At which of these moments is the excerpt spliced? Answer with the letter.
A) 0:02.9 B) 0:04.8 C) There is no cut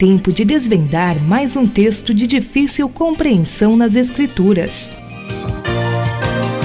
B